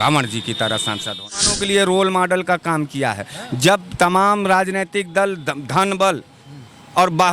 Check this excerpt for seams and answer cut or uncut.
cut